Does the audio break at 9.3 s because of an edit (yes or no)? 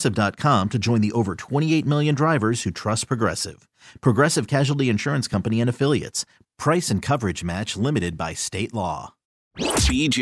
yes